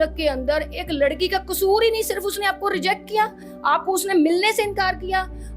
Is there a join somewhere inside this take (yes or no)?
no